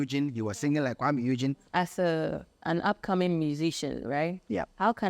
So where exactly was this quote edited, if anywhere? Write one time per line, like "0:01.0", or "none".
0:01.6